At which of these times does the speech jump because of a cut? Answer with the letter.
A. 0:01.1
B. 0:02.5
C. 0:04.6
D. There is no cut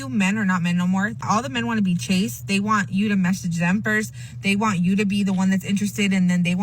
A